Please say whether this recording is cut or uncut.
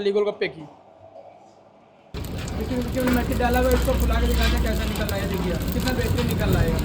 cut